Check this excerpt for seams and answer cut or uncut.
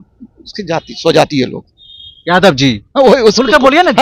uncut